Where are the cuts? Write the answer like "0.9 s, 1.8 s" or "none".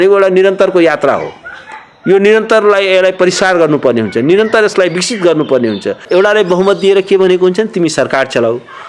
6.0 s